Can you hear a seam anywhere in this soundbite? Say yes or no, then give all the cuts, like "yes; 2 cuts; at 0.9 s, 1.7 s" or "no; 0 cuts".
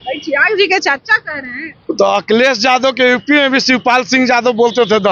no; 0 cuts